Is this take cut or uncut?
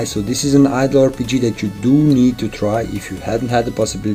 uncut